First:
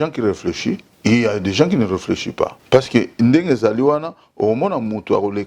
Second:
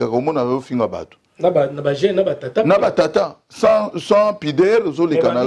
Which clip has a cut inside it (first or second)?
first